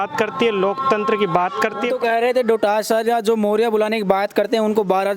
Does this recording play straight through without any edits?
no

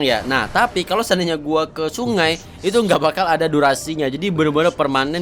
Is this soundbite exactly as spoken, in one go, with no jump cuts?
yes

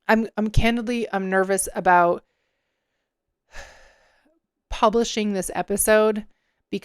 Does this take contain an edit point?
no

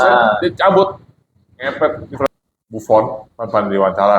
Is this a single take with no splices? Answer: no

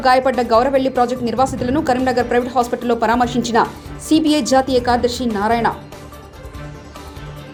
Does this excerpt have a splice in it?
no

